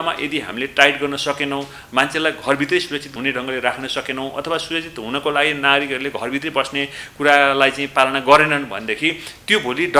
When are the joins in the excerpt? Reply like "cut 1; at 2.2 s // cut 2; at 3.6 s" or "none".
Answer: none